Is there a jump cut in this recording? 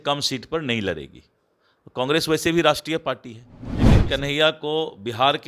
yes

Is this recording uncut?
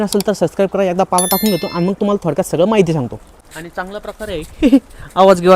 no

